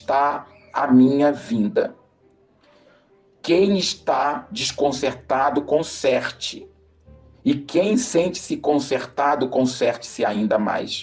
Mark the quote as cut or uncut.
uncut